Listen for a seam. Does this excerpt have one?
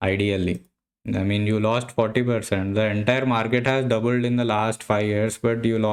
no; 0 cuts

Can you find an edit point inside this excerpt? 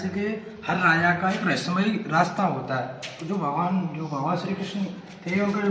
no; 0 cuts

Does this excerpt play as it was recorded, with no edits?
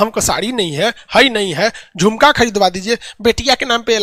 yes; 0 cuts

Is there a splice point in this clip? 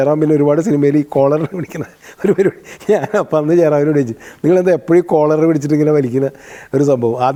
no; 0 cuts

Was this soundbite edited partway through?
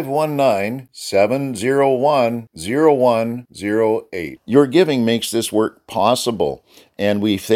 no; 0 cuts

